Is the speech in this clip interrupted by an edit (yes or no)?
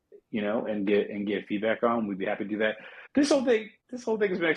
no